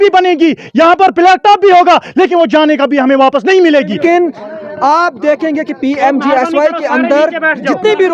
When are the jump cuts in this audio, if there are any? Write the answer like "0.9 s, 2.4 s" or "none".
4.0 s